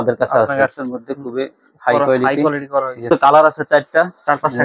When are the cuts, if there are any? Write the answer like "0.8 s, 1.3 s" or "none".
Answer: 0.8 s, 3.1 s